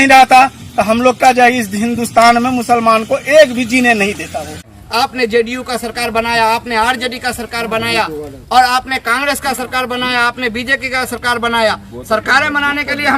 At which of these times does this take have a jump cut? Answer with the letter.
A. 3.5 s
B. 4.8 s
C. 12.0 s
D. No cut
B